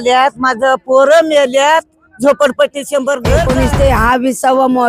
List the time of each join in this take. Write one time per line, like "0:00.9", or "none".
0:03.5